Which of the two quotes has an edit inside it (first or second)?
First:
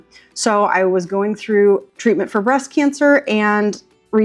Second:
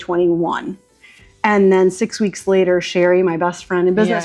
first